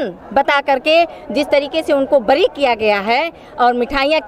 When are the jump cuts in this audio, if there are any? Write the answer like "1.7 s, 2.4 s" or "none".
none